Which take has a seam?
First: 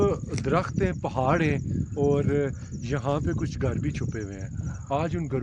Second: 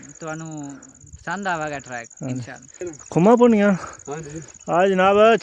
second; 1 cut; at 2.9 s

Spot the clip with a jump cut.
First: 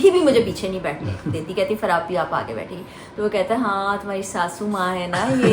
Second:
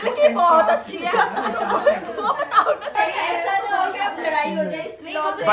second; 1 cut; at 2.9 s

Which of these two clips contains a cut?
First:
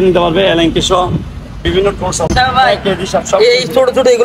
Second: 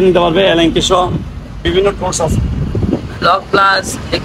first; 1 cut; at 2.3 s

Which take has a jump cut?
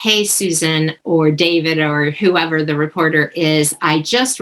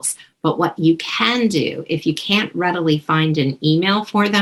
first; 1 cut; at 1.0 s

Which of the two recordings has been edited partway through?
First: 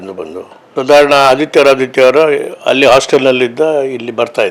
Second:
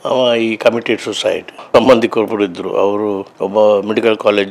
second; 1 cut; at 1.6 s

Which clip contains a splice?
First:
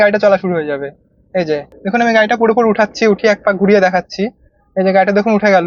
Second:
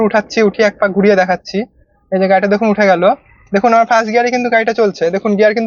first; 1 cut; at 1.7 s

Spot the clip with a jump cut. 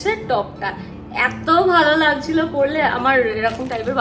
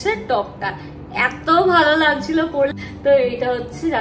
second; 1 cut; at 2.7 s

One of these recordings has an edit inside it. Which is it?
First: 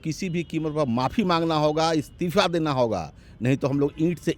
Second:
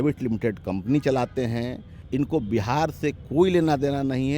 second; 1 cut; at 2.0 s

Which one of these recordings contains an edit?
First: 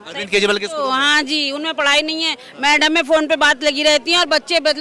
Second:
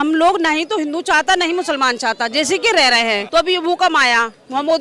second; 1 cut; at 3.2 s

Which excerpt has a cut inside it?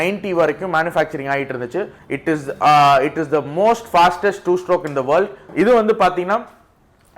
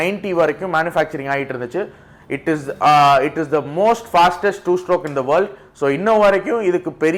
first; 2 cuts; at 2.0 s, 5.4 s

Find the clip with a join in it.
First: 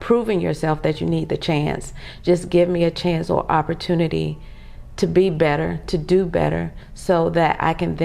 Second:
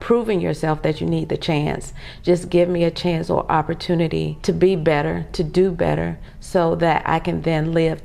second; 1 cut; at 4.3 s

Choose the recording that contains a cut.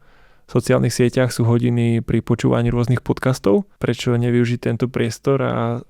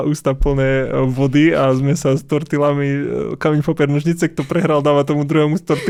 first; 1 cut; at 3.7 s

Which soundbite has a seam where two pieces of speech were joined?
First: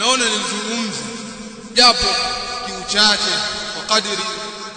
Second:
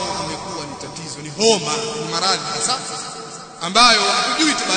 first; 1 cut; at 1.6 s

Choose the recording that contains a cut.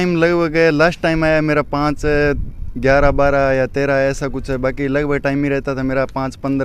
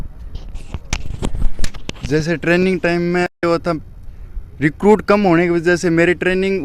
second; 1 cut; at 3.4 s

